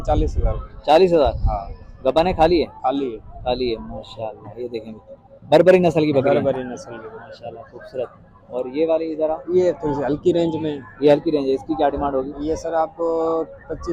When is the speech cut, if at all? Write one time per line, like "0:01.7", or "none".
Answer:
none